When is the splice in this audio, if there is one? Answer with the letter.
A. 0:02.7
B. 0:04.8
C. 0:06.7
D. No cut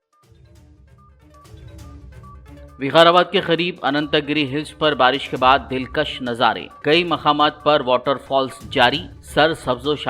A